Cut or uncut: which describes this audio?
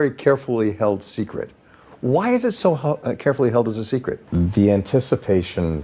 cut